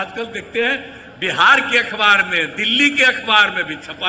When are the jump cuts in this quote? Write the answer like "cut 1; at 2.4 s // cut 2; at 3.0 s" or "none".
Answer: none